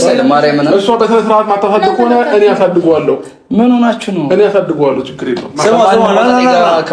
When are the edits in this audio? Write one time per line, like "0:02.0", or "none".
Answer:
none